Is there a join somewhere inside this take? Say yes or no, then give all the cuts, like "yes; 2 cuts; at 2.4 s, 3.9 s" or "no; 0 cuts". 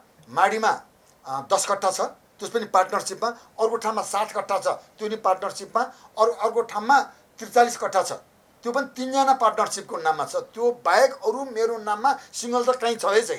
no; 0 cuts